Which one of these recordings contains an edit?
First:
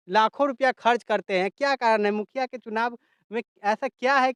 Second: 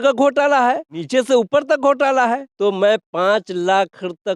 second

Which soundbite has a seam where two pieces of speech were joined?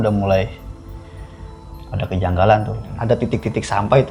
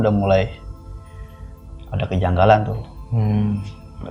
first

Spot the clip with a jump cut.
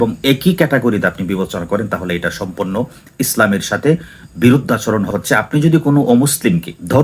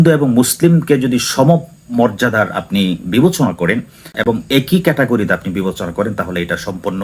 first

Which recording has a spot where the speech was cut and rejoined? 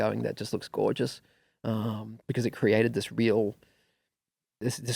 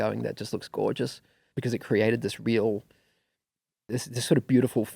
second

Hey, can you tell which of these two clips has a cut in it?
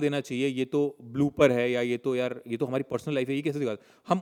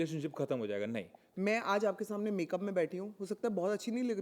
second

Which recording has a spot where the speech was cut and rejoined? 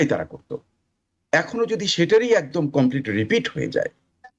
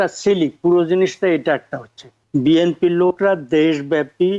second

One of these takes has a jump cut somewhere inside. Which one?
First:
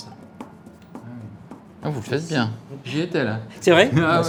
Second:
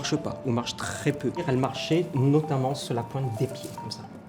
second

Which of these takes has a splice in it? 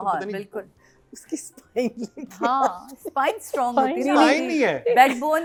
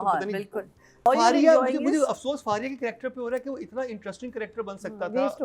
second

